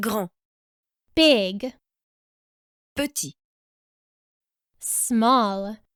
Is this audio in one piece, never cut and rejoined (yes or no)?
yes